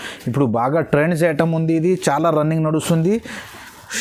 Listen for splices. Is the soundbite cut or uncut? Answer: uncut